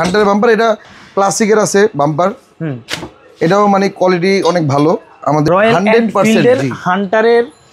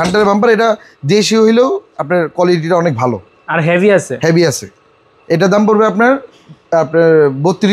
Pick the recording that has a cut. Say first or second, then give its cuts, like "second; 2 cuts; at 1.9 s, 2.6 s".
first; 2 cuts; at 0.9 s, 5.5 s